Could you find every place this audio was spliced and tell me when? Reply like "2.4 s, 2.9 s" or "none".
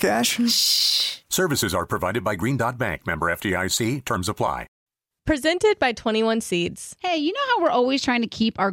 4.7 s